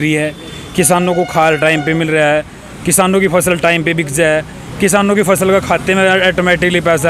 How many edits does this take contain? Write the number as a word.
zero